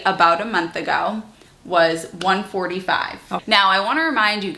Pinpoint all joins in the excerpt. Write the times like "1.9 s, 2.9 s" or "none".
3.3 s